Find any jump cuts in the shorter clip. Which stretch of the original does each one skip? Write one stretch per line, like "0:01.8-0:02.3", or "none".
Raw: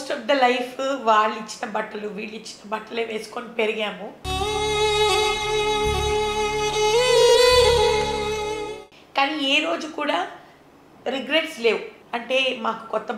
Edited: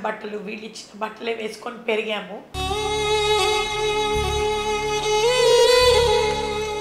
none